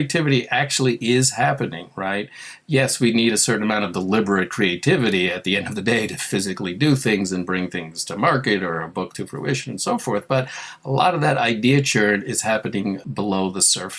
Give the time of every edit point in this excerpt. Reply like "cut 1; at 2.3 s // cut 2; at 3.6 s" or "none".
cut 1; at 13.0 s